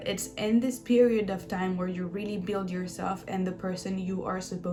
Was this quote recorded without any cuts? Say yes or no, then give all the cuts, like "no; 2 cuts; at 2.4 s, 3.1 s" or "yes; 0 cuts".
yes; 0 cuts